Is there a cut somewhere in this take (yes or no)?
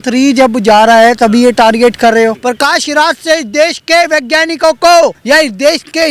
yes